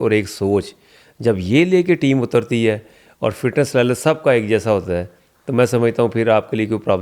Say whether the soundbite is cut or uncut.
uncut